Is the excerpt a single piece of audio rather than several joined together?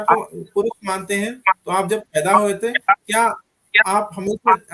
yes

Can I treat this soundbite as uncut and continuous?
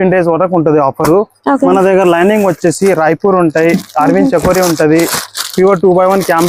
yes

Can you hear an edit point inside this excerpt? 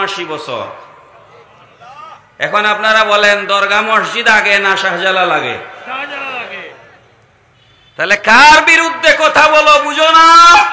no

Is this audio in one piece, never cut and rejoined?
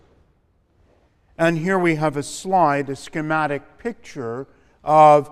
yes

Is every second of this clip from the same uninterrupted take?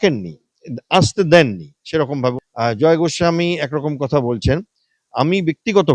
no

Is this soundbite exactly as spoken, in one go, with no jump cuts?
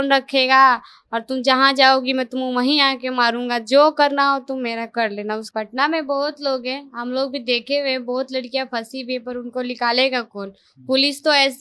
no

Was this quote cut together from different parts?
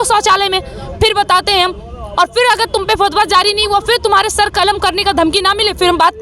no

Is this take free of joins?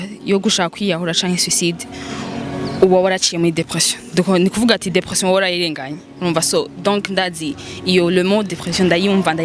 yes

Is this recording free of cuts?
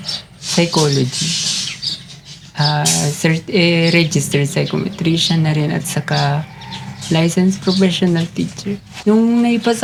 yes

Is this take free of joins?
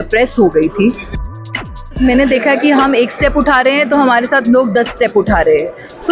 no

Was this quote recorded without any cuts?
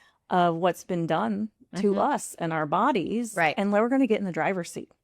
yes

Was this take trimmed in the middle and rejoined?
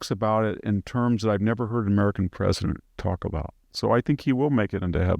yes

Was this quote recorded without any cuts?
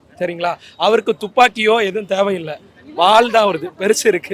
yes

